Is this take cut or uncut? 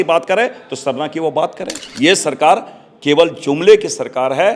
cut